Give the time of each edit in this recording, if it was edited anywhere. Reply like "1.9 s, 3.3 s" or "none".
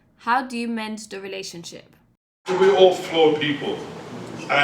2.4 s